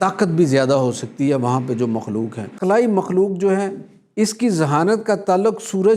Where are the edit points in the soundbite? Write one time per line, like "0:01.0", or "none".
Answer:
0:02.6